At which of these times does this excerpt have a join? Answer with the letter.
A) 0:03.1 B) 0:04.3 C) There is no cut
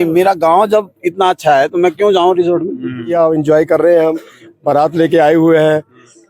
A